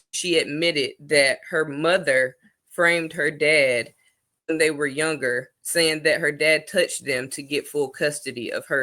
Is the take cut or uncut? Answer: uncut